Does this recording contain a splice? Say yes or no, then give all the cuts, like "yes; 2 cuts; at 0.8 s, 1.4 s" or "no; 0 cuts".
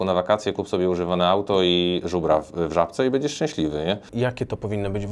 yes; 1 cut; at 4.1 s